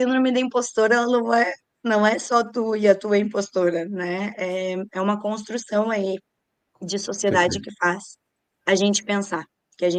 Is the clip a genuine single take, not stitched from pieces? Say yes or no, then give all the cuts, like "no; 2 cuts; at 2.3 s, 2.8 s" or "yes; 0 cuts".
yes; 0 cuts